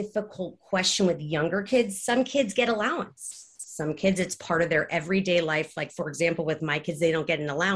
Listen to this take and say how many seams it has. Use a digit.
0